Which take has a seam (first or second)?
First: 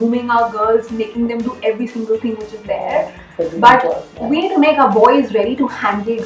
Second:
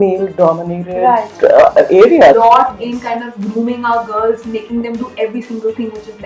second